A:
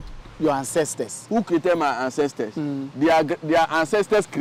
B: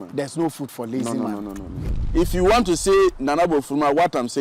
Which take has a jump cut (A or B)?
B